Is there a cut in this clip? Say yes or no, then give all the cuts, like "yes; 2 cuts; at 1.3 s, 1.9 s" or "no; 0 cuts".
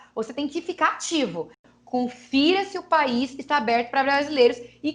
yes; 1 cut; at 1.6 s